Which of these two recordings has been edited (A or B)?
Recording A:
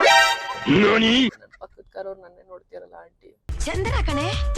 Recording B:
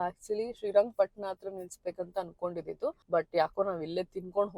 A